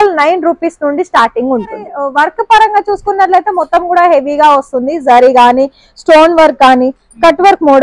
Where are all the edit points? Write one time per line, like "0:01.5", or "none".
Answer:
0:02.0